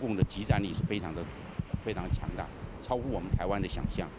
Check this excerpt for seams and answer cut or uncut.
uncut